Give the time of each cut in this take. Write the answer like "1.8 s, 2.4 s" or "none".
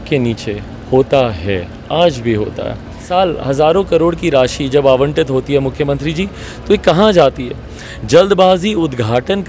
3.0 s